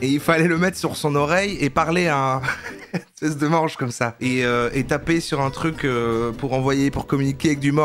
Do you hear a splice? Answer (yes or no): no